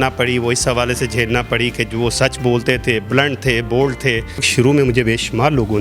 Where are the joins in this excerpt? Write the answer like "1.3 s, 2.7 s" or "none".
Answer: 4.5 s